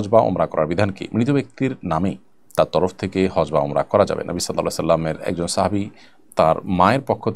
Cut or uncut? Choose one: uncut